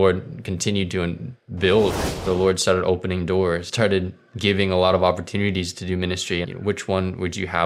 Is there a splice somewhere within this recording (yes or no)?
yes